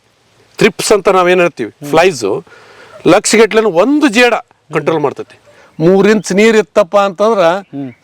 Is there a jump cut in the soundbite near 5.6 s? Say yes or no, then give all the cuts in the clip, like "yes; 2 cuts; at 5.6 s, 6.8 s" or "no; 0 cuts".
yes; 1 cut; at 5.6 s